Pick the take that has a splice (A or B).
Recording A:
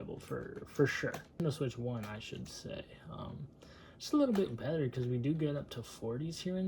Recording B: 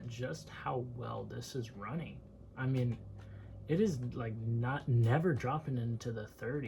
A